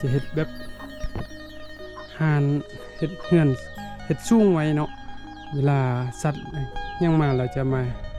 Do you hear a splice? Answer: no; 0 cuts

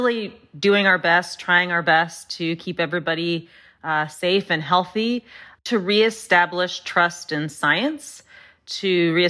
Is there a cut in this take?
yes; 1 cut; at 5.6 s

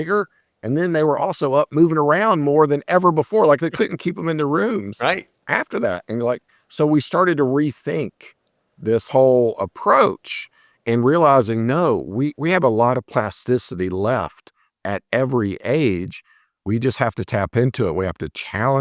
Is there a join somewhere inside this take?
no; 0 cuts

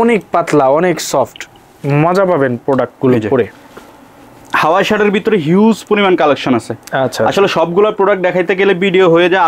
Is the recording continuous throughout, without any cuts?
yes; 0 cuts

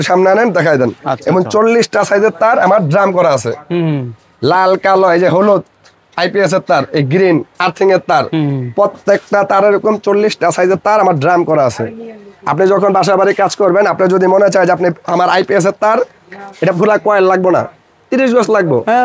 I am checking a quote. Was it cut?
no; 0 cuts

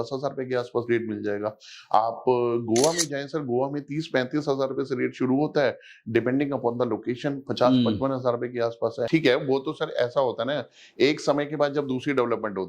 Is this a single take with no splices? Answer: no; 1 cut; at 9.1 s

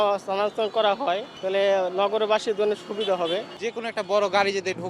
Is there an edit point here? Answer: yes; 1 cut; at 1.3 s

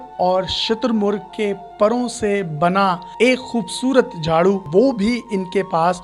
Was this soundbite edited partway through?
yes; 1 cut; at 4.6 s

